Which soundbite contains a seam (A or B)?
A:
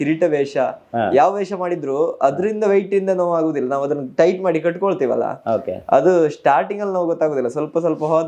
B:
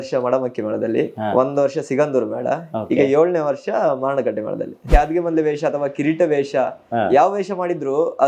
B